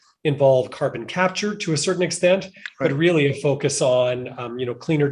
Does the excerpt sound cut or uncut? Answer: uncut